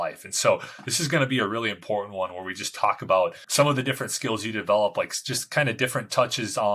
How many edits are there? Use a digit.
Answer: 1